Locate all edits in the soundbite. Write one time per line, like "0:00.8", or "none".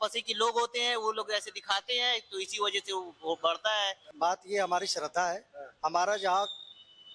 0:04.1